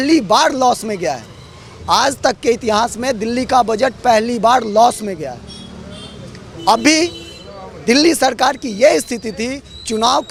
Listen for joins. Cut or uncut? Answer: uncut